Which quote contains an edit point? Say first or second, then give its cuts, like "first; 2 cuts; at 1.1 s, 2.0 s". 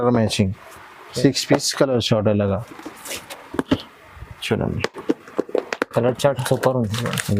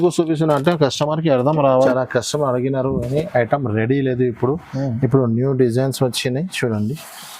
second; 1 cut; at 1.9 s